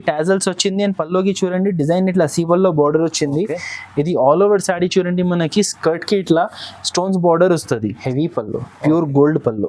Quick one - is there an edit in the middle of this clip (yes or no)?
yes